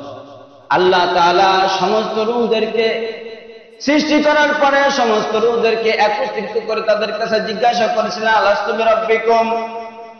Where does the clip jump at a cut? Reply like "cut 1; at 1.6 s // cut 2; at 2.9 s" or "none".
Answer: none